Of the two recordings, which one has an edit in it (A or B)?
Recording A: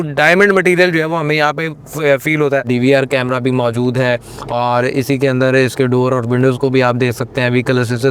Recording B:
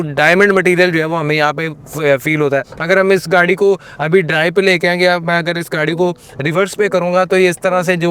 A